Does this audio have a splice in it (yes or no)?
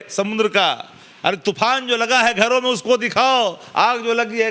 no